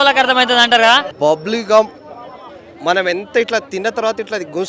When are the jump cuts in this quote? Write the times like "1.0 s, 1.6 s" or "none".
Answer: 1.1 s